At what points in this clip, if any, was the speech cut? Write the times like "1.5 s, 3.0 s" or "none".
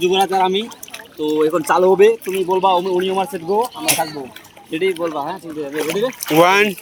none